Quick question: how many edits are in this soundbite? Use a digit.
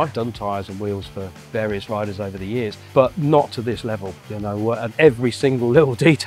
2